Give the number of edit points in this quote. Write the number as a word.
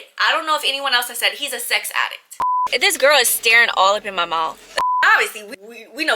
two